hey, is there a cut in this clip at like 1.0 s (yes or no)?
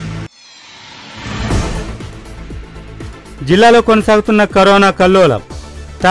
no